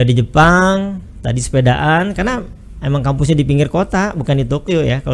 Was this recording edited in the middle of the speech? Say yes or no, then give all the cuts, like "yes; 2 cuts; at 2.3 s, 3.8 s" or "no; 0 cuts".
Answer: no; 0 cuts